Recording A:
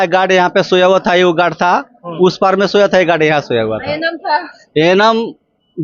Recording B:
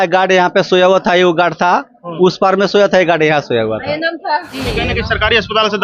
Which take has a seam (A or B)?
B